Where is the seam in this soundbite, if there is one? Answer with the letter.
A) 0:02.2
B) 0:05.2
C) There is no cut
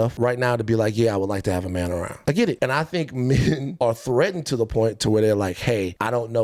C